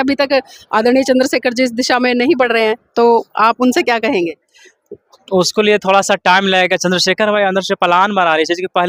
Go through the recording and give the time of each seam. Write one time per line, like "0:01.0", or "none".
none